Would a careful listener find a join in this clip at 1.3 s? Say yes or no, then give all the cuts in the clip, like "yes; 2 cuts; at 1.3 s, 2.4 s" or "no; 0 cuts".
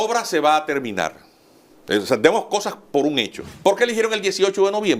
no; 1 cut; at 3.5 s